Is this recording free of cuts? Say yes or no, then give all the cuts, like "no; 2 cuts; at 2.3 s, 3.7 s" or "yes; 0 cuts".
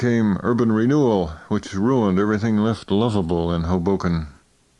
yes; 0 cuts